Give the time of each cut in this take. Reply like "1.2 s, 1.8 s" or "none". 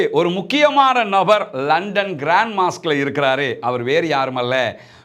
none